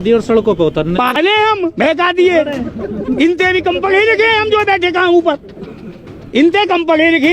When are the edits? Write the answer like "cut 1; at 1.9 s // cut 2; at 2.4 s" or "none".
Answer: cut 1; at 1.1 s